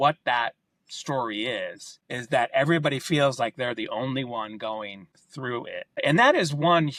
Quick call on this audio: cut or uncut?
uncut